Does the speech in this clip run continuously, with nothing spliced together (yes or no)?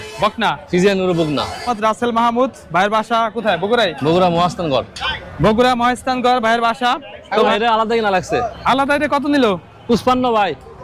no